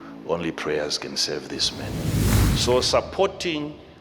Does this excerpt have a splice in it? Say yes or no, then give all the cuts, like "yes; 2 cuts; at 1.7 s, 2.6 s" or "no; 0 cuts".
yes; 1 cut; at 2.3 s